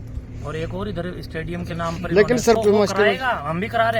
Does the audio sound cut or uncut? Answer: cut